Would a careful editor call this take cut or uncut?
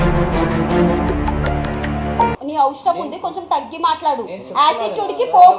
cut